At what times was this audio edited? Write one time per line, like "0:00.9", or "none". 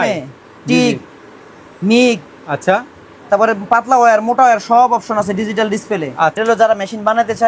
0:06.4